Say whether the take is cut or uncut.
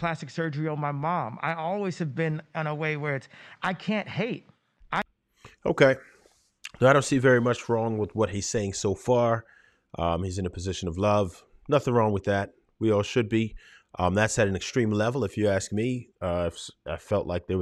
uncut